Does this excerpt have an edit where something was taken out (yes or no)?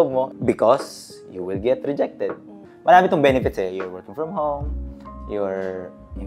no